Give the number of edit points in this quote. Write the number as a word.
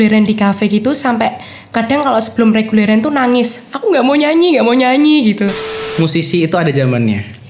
one